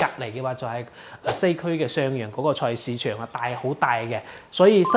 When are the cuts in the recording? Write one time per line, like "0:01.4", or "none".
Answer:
none